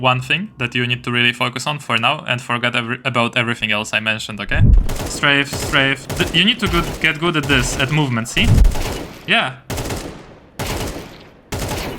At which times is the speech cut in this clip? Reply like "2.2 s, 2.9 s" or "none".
4.8 s, 6.0 s, 8.6 s

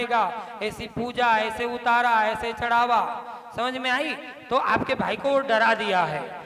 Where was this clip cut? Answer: none

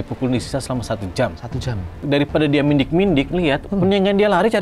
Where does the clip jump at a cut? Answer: 2.0 s

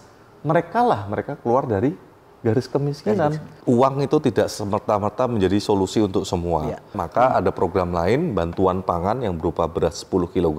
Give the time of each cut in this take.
3.5 s, 7.0 s

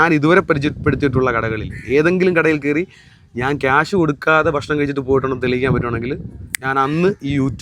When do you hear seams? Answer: none

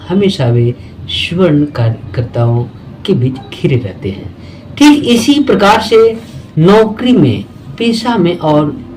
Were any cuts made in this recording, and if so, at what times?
none

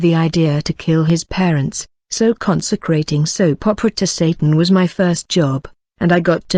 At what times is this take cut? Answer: 2.0 s

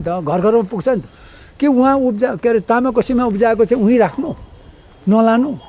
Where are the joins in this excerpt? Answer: none

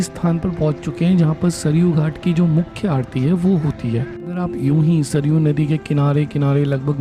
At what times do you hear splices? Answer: 4.3 s

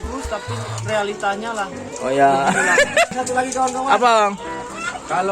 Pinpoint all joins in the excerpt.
3.1 s

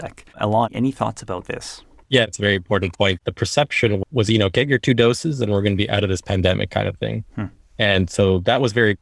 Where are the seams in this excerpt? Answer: 3.2 s

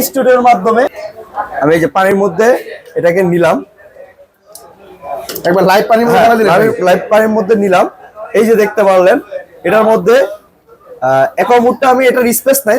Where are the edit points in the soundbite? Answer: 1.0 s

